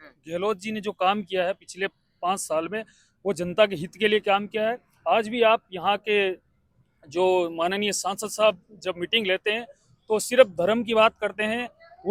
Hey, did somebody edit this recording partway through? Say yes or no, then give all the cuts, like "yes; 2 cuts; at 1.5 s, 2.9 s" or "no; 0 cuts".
no; 0 cuts